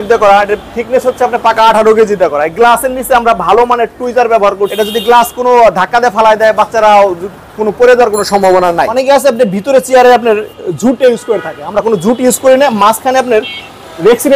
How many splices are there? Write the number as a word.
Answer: two